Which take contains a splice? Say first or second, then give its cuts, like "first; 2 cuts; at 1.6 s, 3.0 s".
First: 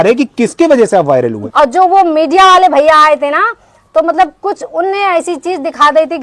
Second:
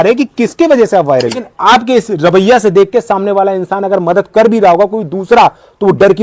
second; 1 cut; at 1.4 s